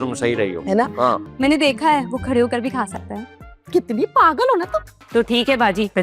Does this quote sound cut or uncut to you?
cut